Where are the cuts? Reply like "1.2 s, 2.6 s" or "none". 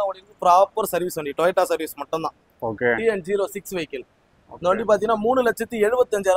none